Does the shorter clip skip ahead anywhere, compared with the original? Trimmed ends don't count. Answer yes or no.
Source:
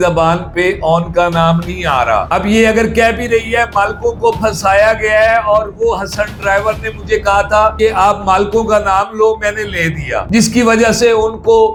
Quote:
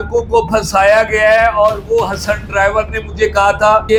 no